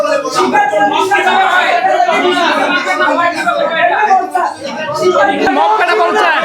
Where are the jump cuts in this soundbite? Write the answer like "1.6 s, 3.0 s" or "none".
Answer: 5.5 s